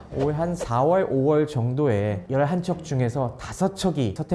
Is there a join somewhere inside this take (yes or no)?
no